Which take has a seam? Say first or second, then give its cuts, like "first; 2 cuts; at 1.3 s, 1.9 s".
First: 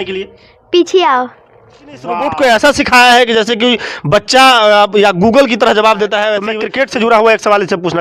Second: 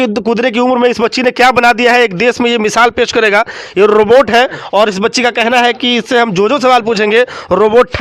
first; 2 cuts; at 2.1 s, 6.6 s